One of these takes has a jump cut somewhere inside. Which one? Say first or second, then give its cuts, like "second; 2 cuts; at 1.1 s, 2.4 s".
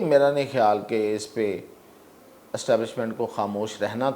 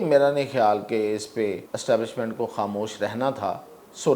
second; 1 cut; at 1.7 s